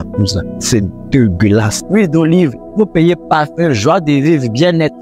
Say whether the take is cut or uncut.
cut